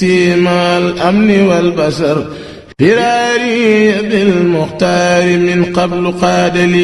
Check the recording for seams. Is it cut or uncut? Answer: cut